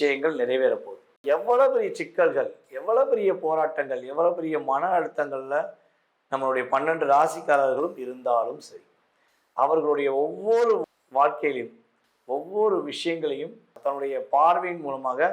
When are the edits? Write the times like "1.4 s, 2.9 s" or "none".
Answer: 1.2 s, 13.8 s